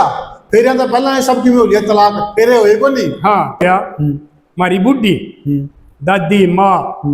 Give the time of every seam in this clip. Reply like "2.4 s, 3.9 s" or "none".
3.6 s